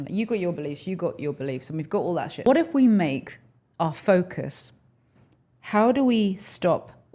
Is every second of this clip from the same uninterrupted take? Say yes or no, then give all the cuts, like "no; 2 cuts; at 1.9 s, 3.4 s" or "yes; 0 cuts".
no; 1 cut; at 2.5 s